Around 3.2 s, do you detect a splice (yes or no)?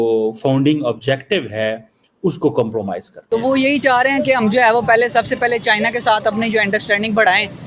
yes